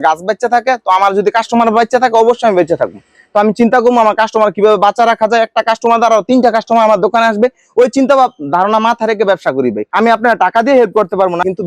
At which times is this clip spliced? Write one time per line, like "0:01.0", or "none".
0:09.8